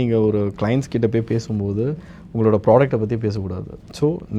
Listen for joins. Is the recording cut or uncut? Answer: uncut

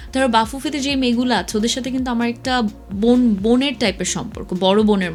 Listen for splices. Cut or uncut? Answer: uncut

